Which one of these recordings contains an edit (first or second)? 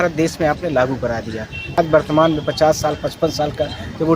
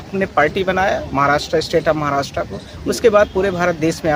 first